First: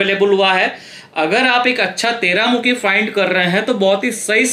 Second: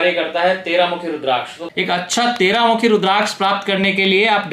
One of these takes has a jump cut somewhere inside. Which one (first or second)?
second